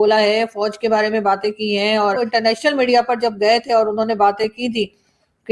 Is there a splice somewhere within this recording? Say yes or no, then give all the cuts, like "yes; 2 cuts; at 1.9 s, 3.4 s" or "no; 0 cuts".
yes; 1 cut; at 2.2 s